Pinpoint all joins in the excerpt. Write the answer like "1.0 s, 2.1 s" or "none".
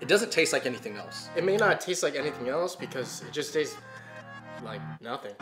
1.3 s